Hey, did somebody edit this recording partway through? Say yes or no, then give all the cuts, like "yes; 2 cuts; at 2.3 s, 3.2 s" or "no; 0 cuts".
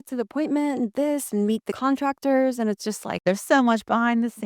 yes; 2 cuts; at 1.7 s, 3.2 s